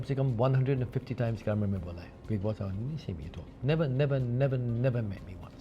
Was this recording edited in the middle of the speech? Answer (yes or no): no